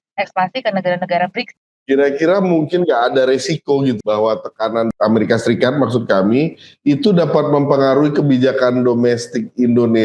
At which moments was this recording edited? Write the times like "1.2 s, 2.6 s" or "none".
1.5 s, 4.0 s, 4.9 s